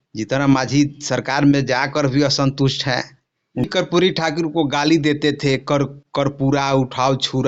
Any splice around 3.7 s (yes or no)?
yes